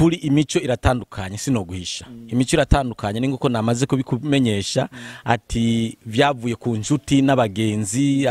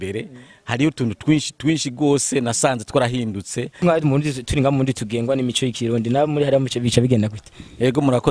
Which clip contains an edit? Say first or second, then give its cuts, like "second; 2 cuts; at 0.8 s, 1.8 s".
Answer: second; 1 cut; at 3.7 s